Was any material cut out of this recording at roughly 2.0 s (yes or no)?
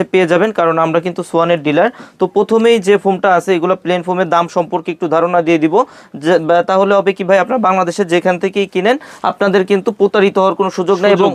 no